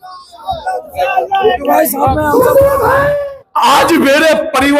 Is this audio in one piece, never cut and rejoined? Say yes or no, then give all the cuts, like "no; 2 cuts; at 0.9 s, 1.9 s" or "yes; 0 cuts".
no; 1 cut; at 3.2 s